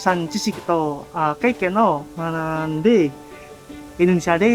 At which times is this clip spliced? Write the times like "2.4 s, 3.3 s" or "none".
2.1 s